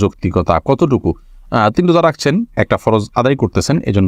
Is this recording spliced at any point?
no; 0 cuts

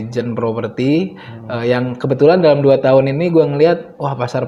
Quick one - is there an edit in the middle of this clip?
no; 0 cuts

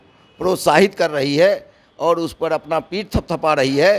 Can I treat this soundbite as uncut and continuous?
yes; 0 cuts

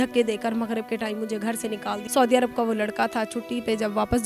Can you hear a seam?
yes; 1 cut; at 2.0 s

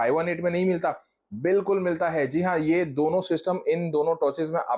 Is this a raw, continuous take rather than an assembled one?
yes; 0 cuts

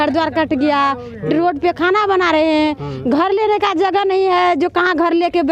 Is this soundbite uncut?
yes; 0 cuts

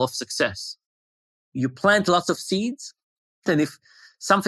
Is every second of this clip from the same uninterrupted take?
no; 2 cuts; at 1.2 s, 3.6 s

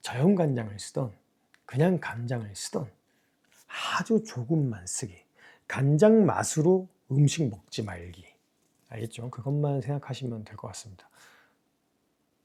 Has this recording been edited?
no; 0 cuts

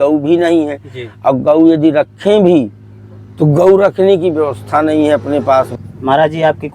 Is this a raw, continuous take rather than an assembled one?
no; 1 cut; at 5.8 s

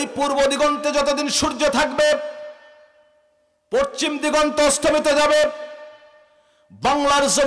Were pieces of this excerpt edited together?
no; 0 cuts

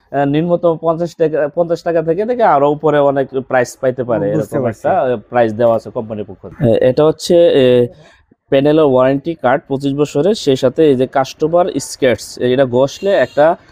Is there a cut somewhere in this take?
no; 0 cuts

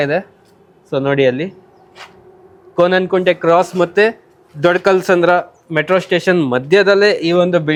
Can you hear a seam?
no; 0 cuts

